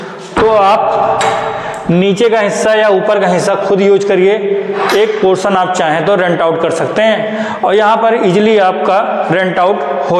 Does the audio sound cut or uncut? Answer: uncut